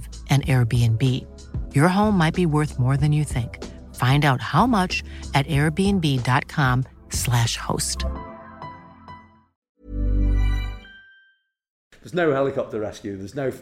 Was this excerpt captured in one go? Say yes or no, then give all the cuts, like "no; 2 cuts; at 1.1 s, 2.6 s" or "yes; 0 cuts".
no; 1 cut; at 11.9 s